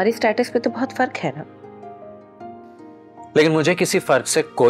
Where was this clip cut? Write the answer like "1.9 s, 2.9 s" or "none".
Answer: none